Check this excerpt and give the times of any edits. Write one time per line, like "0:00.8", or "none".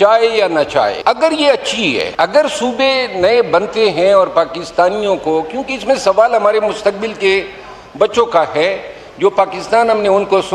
0:01.0
0:02.1